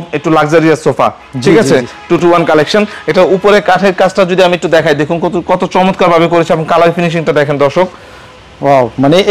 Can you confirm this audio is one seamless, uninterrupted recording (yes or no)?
yes